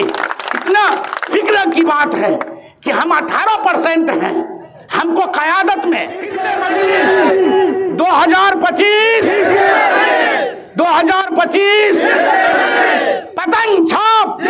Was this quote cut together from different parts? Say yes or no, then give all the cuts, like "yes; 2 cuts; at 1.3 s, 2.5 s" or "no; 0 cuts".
yes; 1 cut; at 6.4 s